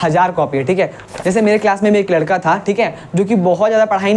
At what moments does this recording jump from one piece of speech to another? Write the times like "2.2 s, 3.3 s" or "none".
1.1 s